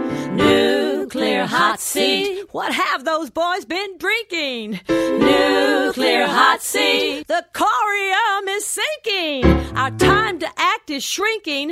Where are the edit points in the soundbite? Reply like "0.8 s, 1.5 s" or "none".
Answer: none